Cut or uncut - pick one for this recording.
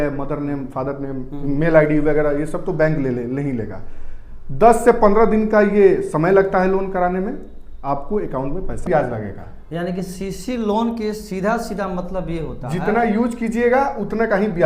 cut